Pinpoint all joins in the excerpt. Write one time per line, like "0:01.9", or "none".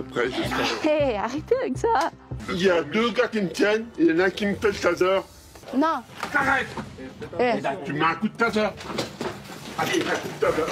0:02.4
0:05.6